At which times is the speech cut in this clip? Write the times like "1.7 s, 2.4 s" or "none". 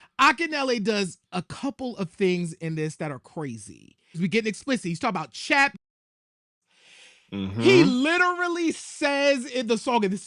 4.2 s